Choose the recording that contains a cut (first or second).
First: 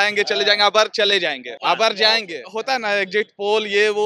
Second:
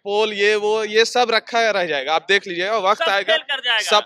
first